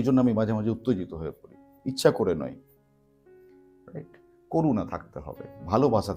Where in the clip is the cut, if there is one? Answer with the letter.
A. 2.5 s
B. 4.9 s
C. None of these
C